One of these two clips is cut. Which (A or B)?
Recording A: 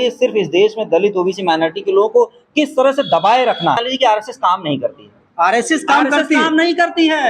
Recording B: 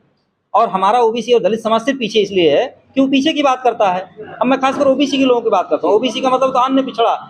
A